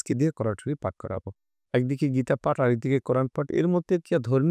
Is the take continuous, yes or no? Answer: yes